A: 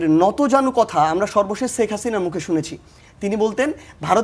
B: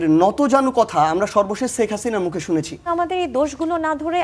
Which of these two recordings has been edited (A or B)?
B